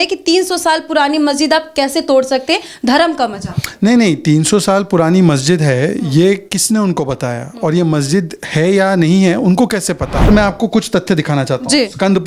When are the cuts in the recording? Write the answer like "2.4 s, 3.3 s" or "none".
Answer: 10.3 s